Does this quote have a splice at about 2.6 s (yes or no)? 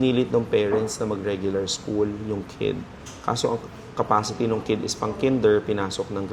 no